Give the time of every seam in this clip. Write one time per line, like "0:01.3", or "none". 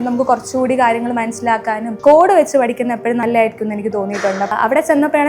0:01.9
0:03.2
0:04.5